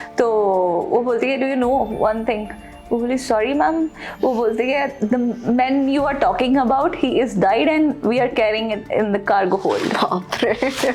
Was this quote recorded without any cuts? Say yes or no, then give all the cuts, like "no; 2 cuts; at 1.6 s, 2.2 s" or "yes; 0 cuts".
yes; 0 cuts